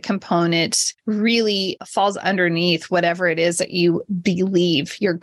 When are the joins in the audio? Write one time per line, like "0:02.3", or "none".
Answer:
none